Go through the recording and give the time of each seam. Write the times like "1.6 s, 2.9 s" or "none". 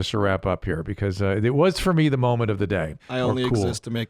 3.0 s